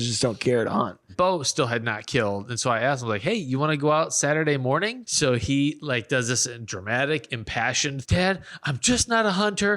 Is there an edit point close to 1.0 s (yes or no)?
yes